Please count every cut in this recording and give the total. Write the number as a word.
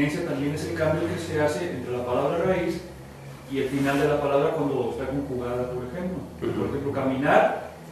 zero